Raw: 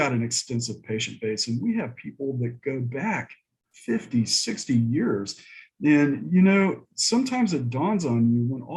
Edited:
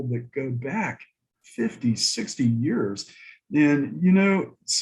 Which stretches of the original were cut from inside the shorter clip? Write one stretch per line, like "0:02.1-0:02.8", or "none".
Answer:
none